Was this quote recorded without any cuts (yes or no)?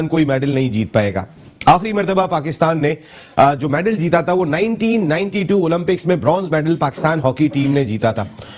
yes